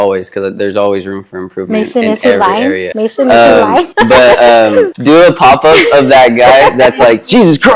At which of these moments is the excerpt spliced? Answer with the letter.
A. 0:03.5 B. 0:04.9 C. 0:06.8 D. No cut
B